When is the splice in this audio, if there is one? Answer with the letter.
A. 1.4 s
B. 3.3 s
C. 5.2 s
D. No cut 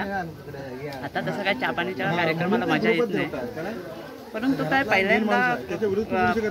D